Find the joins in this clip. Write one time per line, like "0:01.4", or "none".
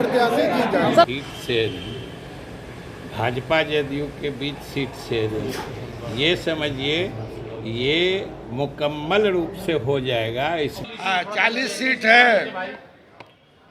0:01.1
0:10.8